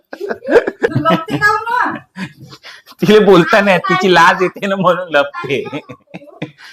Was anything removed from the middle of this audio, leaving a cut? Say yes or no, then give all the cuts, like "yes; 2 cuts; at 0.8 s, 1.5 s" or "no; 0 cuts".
yes; 1 cut; at 0.9 s